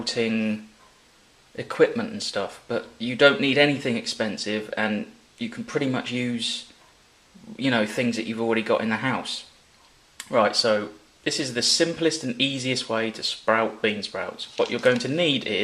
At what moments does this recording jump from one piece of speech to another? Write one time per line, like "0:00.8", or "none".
0:13.0